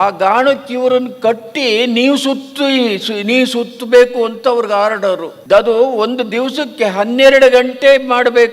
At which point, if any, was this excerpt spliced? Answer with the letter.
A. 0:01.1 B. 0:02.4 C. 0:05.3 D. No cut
C